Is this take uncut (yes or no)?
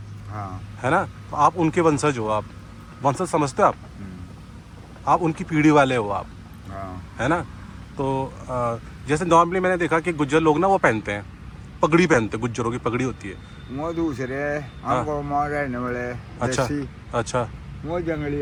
yes